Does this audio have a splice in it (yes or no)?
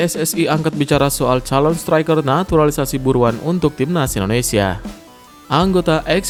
no